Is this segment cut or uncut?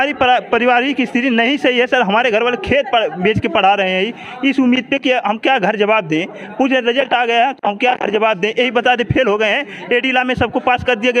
uncut